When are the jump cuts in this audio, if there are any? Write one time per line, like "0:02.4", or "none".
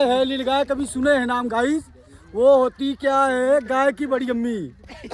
none